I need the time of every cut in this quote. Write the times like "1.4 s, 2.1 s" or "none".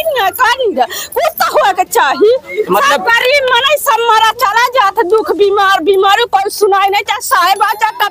none